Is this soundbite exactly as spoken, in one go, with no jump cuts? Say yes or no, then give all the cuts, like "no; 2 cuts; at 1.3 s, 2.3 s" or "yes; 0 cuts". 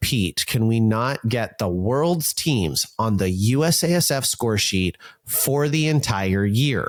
yes; 0 cuts